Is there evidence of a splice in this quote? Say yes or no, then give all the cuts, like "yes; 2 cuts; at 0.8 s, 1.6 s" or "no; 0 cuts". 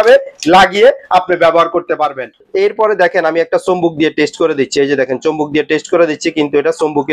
yes; 1 cut; at 2.4 s